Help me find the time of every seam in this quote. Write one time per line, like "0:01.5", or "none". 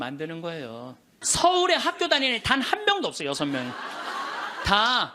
0:01.1